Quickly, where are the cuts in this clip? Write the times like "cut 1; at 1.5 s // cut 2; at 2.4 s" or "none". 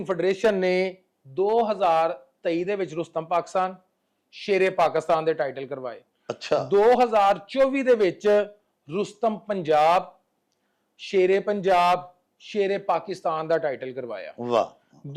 none